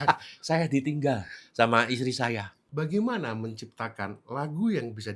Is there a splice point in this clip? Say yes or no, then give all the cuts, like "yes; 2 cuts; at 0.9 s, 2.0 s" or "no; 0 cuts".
yes; 1 cut; at 2.6 s